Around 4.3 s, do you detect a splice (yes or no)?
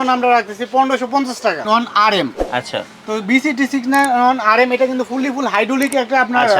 no